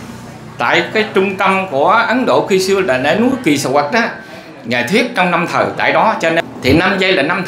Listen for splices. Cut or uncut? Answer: cut